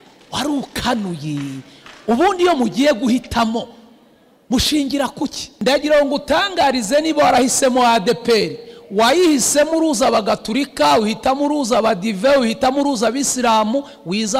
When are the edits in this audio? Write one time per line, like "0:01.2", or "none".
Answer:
0:05.5